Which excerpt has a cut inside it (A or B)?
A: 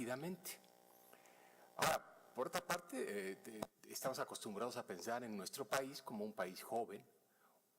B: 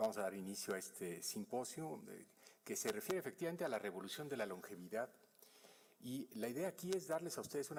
A